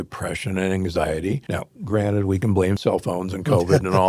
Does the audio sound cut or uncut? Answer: cut